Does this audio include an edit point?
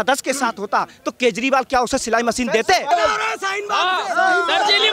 yes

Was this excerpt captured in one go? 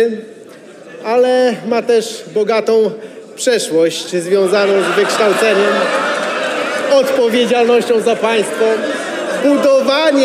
yes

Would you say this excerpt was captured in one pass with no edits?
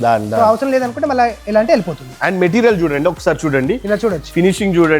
no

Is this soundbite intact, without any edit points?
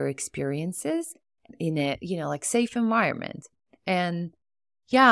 no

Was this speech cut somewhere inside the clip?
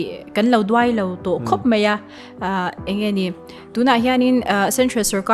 no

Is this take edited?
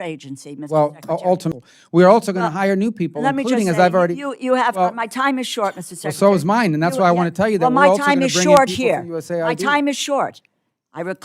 yes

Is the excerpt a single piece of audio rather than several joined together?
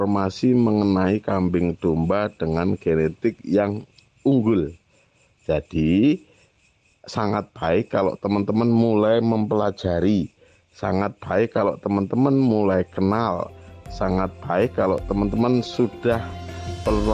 yes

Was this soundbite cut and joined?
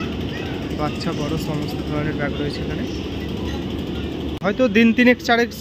yes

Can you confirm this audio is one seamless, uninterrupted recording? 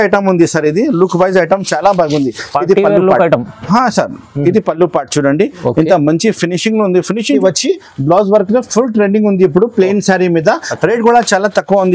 no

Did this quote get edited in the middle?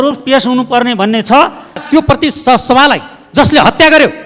yes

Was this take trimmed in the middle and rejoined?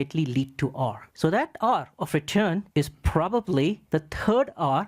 yes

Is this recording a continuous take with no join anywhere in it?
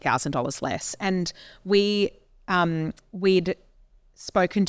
yes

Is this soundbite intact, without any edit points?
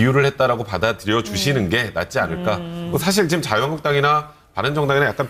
no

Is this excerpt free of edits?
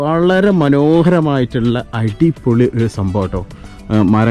yes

